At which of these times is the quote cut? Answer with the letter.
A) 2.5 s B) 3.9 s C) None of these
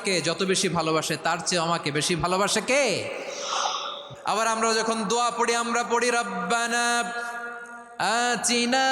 B